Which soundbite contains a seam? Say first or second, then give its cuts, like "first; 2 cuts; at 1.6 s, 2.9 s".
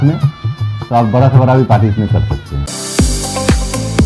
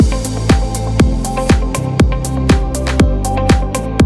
first; 1 cut; at 2.6 s